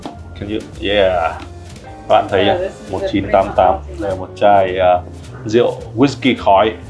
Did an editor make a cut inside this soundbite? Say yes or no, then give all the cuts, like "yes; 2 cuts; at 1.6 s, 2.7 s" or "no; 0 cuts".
no; 0 cuts